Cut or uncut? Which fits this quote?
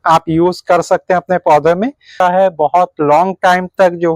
cut